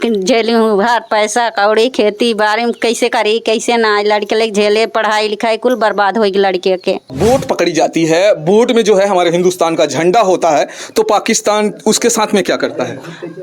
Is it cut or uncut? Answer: cut